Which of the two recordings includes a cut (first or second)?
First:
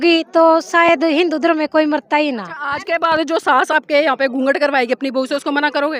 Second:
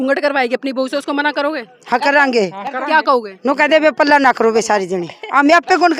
first